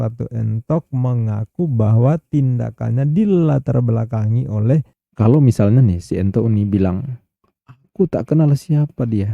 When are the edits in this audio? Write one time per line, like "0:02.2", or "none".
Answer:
0:05.0